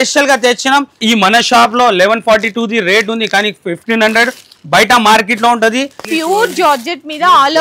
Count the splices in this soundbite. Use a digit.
2